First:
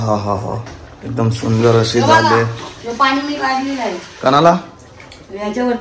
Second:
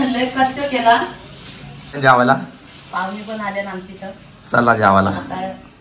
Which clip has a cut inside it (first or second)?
second